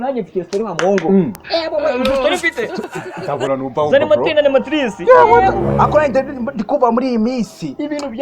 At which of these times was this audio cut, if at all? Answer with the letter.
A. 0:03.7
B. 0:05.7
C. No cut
C